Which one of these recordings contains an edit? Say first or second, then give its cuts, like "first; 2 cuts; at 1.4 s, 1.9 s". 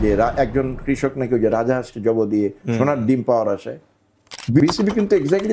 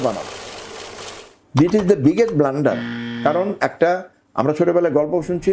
first; 1 cut; at 4.6 s